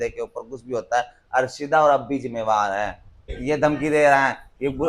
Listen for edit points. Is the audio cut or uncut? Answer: cut